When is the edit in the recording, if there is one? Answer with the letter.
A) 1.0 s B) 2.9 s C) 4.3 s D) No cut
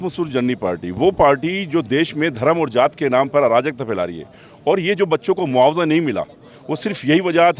D